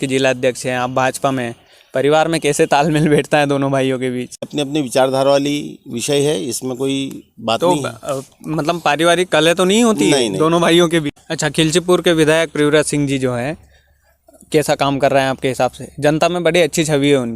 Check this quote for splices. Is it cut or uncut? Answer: cut